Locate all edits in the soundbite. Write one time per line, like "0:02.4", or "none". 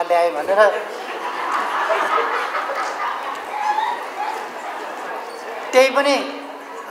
none

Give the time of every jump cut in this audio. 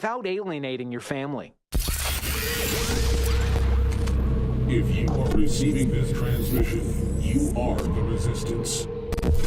0:01.6

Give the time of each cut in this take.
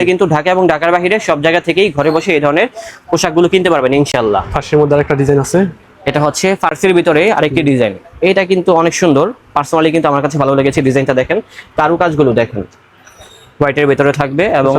none

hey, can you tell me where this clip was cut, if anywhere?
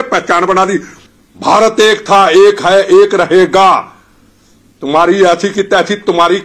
0:00.9

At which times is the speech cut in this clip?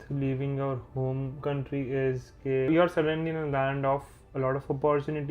0:01.4
0:02.7

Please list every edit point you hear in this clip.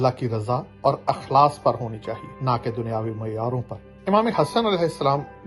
none

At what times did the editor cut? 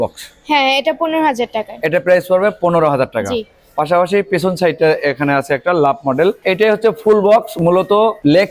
none

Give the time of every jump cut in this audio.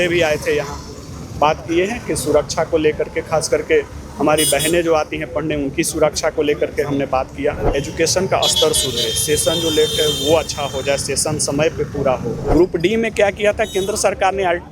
0:07.7
0:12.5

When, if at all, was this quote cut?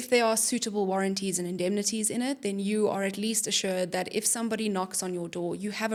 none

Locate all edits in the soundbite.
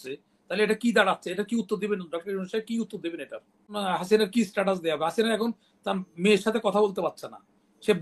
0:03.8

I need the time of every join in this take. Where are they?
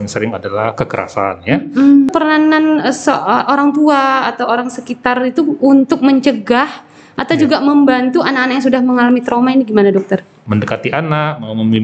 0:02.1
0:10.3

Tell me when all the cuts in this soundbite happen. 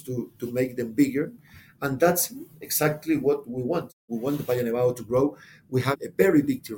0:04.0
0:05.9

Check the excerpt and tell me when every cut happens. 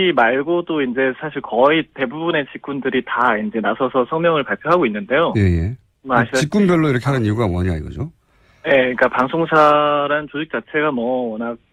none

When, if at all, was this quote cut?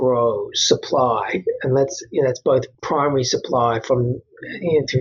0:02.8

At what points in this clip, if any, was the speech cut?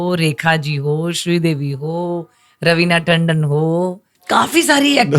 0:04.1

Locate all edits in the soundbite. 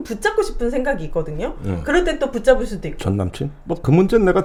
none

